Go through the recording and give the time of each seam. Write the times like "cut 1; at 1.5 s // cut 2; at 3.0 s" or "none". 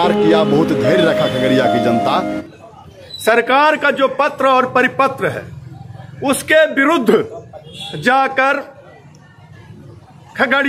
cut 1; at 2.4 s